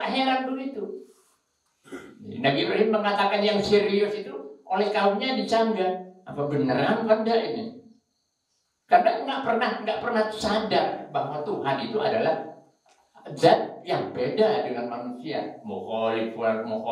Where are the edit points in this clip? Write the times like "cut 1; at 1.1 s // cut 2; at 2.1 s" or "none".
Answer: none